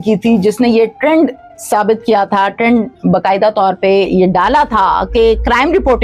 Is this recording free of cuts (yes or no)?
yes